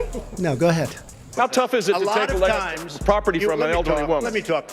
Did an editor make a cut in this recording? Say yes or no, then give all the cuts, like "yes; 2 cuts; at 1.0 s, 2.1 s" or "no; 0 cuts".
yes; 1 cut; at 1.3 s